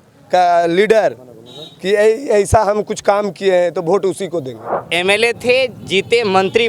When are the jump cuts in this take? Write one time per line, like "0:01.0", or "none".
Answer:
0:04.7